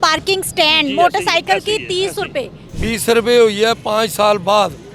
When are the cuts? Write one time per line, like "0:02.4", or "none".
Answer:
0:02.6